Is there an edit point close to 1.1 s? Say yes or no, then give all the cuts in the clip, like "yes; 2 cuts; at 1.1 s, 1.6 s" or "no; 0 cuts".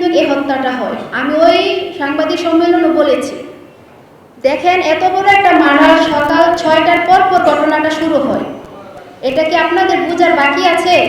no; 0 cuts